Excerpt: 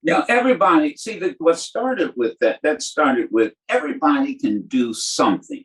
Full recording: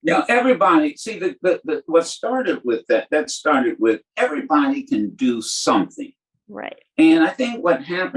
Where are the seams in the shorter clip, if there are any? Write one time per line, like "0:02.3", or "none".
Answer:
0:01.4